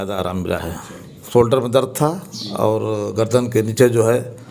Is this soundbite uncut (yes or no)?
no